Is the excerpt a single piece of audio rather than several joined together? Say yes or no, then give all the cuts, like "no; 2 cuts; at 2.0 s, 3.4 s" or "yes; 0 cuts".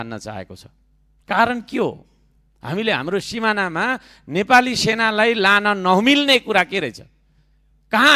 yes; 0 cuts